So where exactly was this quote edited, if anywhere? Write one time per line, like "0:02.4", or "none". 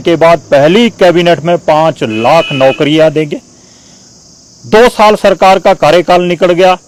none